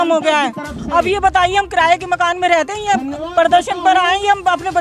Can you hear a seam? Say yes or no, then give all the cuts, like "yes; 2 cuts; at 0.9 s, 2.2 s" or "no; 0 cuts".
no; 0 cuts